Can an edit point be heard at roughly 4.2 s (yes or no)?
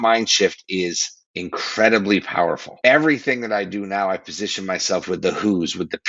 no